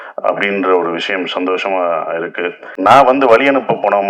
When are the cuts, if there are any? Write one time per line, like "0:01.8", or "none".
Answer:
0:02.6